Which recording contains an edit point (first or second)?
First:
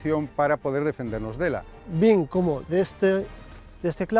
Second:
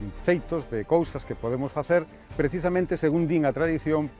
first